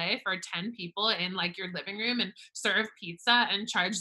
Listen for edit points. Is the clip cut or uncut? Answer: uncut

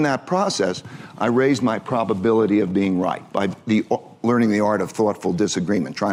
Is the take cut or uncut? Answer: uncut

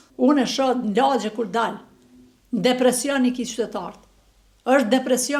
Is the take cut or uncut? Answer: uncut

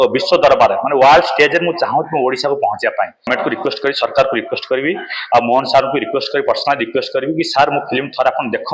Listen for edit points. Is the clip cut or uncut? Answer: cut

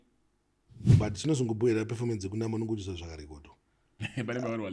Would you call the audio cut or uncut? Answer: cut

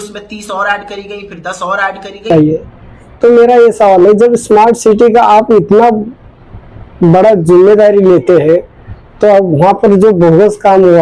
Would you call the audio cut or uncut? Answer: cut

